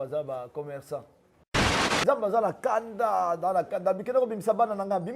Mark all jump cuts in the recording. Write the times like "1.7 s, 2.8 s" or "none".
1.8 s